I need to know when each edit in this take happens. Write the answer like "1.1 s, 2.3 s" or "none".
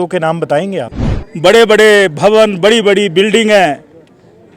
0.9 s